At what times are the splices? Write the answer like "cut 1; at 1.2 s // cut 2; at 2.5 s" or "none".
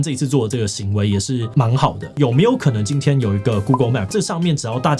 cut 1; at 1.9 s // cut 2; at 4.1 s